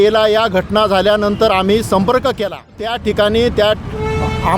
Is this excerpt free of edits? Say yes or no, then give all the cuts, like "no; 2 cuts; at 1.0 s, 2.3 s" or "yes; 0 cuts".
no; 1 cut; at 2.9 s